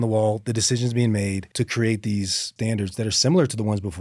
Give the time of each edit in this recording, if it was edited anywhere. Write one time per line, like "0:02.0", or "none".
none